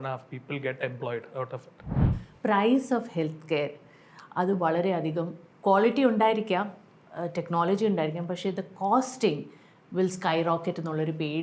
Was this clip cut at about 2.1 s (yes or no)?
yes